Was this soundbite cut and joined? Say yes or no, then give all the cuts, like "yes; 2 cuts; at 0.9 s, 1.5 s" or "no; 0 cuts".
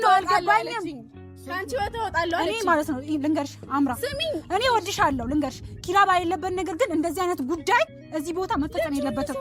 no; 0 cuts